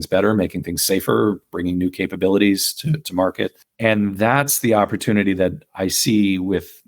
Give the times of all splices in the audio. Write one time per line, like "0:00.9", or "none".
0:03.6

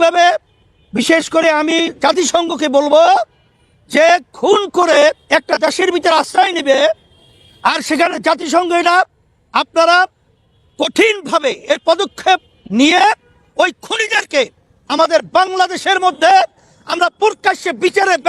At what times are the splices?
none

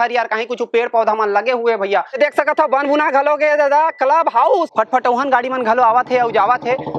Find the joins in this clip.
0:02.1
0:04.7

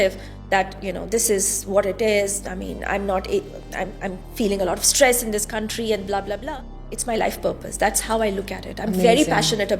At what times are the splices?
0:06.4

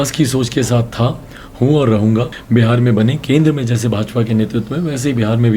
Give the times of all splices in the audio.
0:02.4

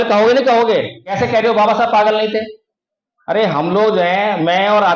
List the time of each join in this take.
0:01.0

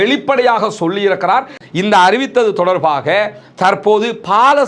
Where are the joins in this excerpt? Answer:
0:01.6

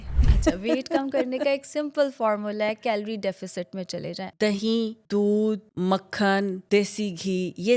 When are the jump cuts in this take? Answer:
0:04.2
0:05.0
0:05.7
0:06.6

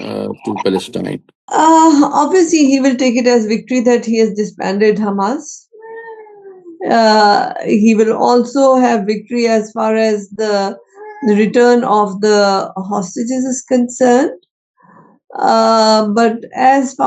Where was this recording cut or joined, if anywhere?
none

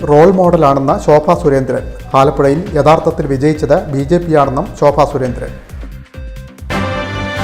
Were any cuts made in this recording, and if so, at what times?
0:06.5

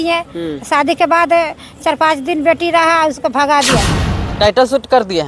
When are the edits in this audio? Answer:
0:04.0

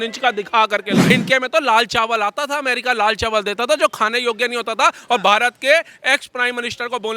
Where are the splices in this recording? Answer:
0:01.0

